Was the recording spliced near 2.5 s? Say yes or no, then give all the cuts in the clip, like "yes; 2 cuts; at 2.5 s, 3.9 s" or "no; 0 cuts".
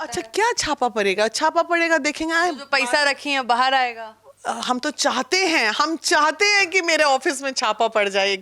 no; 0 cuts